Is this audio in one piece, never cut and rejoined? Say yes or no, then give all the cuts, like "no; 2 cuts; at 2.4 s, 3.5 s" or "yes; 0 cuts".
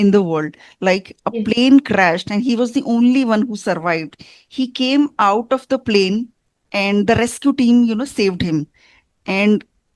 yes; 0 cuts